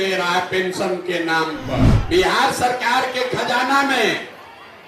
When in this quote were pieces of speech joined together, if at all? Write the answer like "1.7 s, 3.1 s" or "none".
2.0 s